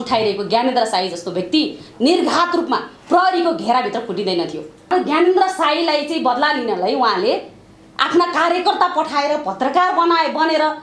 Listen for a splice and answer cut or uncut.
cut